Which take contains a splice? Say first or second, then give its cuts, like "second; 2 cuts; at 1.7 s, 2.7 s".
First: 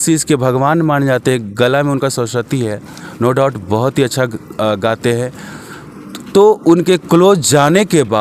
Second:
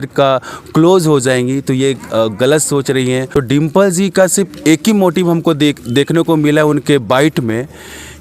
second; 1 cut; at 3.3 s